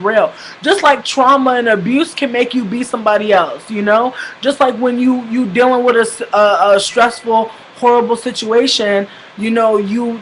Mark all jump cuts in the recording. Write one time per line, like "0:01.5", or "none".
none